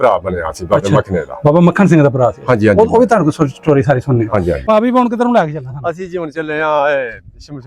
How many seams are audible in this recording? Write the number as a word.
one